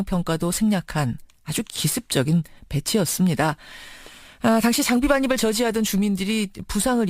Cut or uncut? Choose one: uncut